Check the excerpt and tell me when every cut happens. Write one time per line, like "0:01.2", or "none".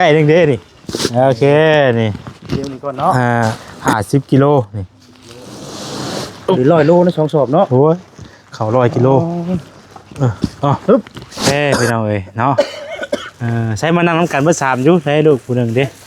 0:03.7
0:11.5